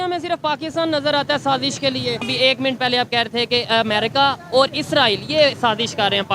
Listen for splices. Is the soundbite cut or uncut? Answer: cut